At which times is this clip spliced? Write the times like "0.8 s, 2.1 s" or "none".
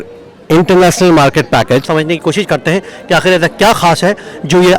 1.9 s